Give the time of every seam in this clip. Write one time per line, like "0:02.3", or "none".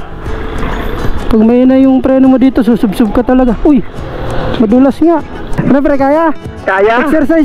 0:05.4